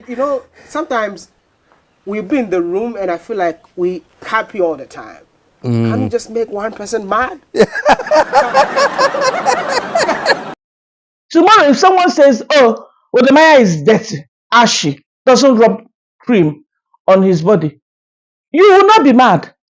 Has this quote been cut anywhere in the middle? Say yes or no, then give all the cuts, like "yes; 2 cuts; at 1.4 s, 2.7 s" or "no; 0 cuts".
yes; 1 cut; at 10.6 s